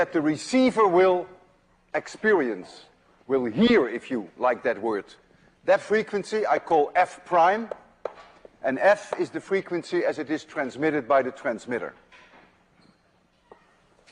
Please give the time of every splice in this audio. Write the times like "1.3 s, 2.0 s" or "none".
2.6 s